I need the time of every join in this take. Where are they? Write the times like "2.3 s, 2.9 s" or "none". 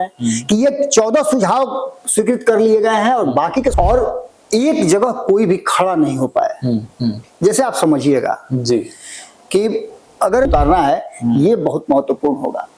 3.7 s, 10.5 s